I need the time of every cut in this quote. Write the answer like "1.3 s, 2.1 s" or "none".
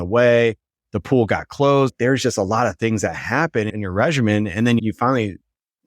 1.9 s, 3.7 s, 4.8 s

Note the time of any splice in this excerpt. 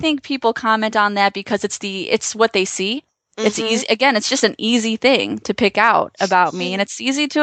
none

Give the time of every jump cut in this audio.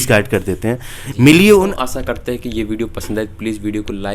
1.8 s

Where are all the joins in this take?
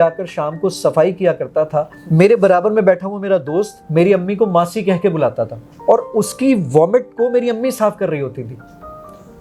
2.0 s, 3.8 s, 5.6 s

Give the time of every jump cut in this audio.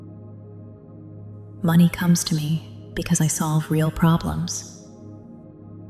1.4 s, 4.5 s

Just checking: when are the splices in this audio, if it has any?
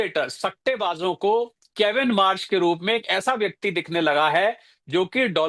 none

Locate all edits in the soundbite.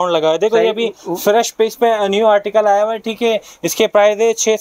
none

